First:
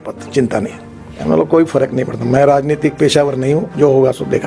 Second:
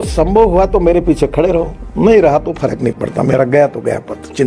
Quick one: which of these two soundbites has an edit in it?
first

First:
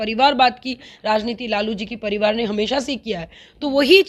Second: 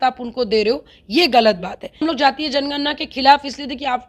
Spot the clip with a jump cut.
second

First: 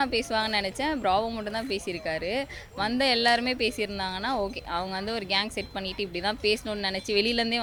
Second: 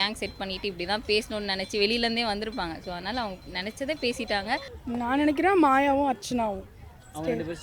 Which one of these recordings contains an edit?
second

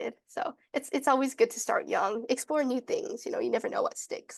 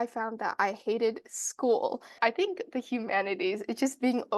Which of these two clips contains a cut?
second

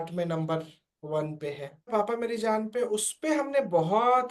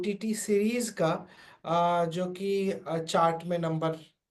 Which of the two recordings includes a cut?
first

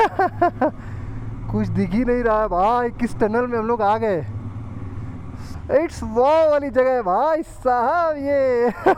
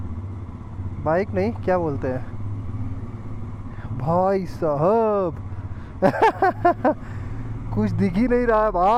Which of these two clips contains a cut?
first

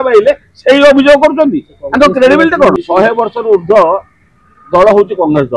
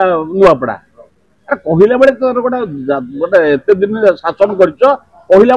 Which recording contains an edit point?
first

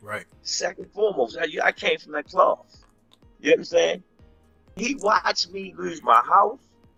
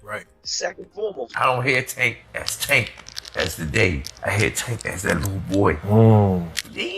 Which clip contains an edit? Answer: second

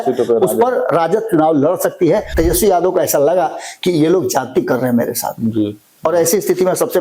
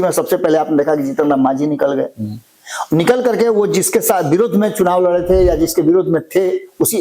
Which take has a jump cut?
first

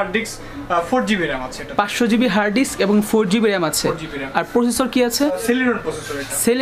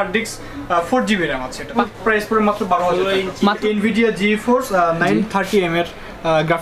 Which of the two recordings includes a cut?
second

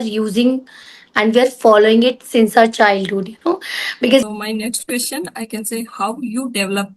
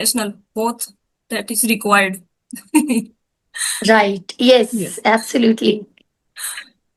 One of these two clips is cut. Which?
first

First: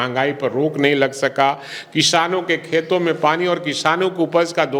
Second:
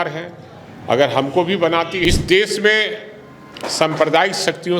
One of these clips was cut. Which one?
second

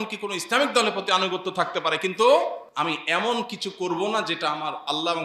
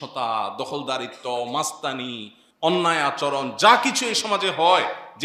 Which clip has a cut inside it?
first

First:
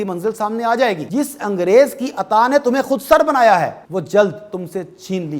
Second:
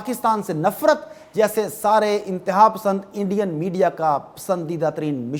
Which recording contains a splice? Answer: first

